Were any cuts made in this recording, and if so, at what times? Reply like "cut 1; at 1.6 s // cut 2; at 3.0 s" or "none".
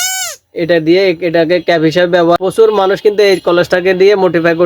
cut 1; at 2.4 s